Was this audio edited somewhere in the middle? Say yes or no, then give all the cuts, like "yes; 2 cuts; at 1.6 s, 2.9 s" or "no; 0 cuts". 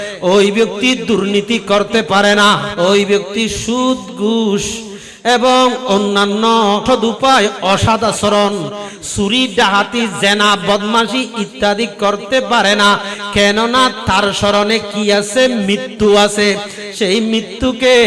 yes; 2 cuts; at 2.7 s, 6.8 s